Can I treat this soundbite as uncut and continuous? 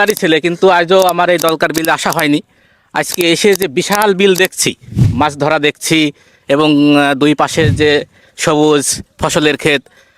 yes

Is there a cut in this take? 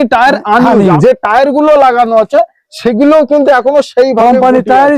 yes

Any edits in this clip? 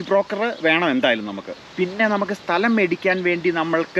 no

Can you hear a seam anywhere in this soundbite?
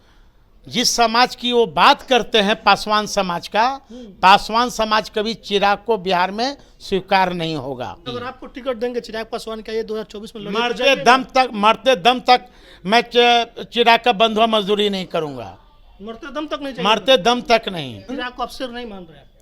yes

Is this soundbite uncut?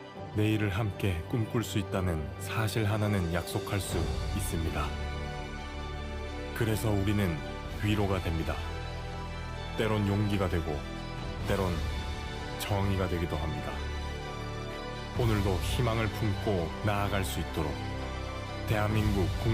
yes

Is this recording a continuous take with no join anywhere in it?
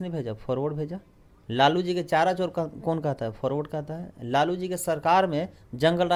yes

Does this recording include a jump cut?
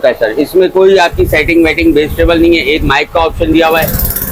no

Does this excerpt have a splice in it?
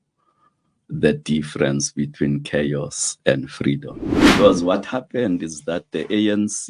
yes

